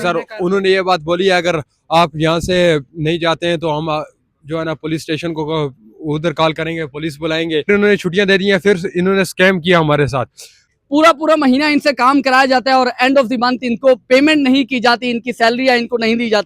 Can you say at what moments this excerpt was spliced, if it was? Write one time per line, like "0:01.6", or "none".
0:07.7
0:10.6